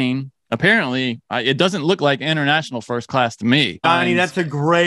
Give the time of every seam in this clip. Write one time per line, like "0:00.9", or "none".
0:03.8